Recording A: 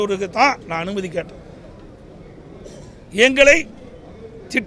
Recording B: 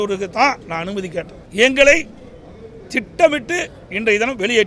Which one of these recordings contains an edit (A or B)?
B